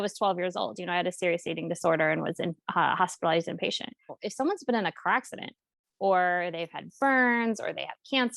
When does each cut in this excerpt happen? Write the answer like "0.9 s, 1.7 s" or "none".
4.2 s